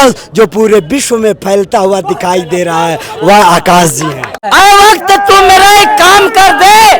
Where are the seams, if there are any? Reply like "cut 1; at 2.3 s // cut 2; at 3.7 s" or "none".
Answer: cut 1; at 4.4 s

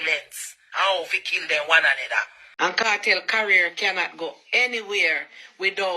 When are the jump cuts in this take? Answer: cut 1; at 2.4 s

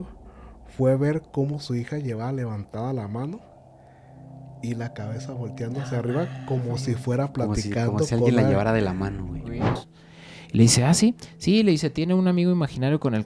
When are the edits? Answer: cut 1; at 9.7 s

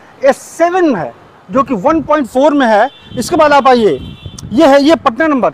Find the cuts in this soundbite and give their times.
none

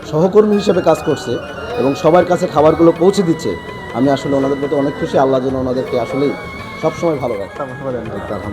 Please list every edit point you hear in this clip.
cut 1; at 7.5 s

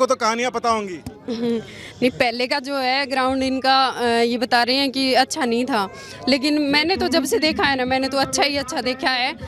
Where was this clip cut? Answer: none

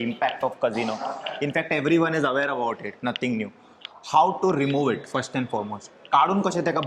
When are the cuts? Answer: none

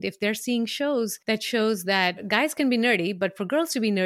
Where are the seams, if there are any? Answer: cut 1; at 1.2 s // cut 2; at 2.2 s

